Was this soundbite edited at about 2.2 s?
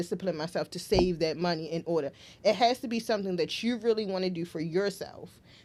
no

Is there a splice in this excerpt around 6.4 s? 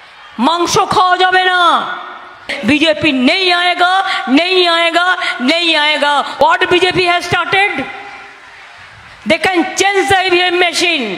yes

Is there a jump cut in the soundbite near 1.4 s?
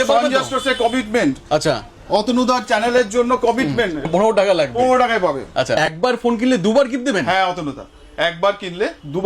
no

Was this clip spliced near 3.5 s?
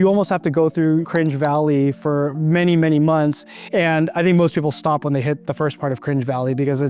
yes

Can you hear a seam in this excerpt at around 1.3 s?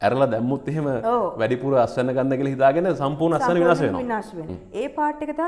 no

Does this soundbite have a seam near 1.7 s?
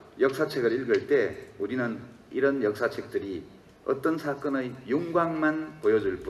no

